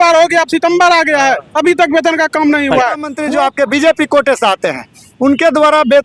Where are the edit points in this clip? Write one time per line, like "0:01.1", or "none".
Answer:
0:03.1